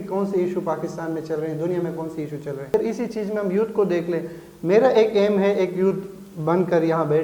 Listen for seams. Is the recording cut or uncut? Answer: cut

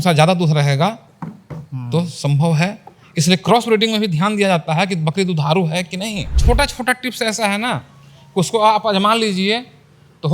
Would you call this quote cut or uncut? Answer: cut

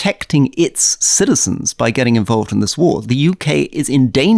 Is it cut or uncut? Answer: uncut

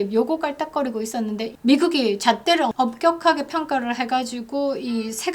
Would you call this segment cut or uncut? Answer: cut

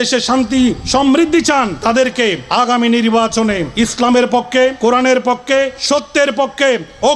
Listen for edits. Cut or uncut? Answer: cut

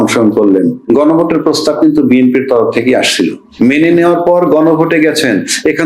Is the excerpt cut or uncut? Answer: cut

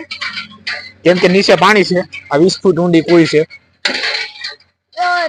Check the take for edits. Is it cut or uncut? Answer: uncut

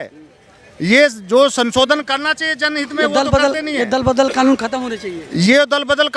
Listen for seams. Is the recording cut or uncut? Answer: uncut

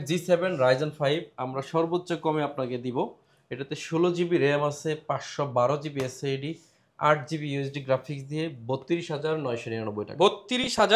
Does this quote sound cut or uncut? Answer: uncut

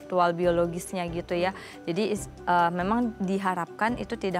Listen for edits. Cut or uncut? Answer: uncut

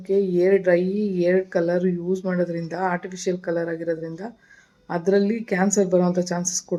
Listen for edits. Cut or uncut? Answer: uncut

